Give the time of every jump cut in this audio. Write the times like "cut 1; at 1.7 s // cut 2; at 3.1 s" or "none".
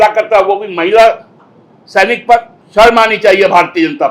cut 1; at 2.6 s